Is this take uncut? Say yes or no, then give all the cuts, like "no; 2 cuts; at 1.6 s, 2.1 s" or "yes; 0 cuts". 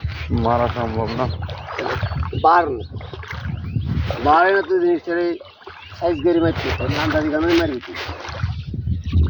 yes; 0 cuts